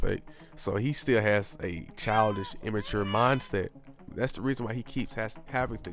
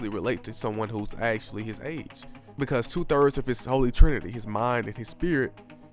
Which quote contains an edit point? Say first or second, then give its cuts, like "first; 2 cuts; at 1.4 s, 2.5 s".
first; 1 cut; at 4.1 s